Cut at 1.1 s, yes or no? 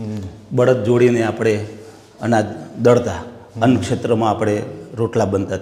no